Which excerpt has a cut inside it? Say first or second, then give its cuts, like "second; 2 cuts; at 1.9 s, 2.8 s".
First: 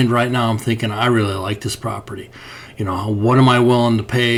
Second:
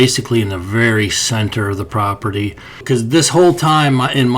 second; 1 cut; at 2.8 s